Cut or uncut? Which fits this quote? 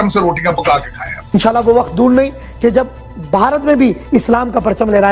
cut